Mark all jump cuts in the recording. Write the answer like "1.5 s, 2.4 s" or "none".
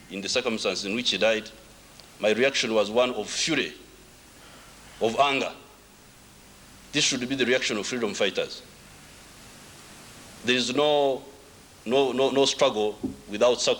none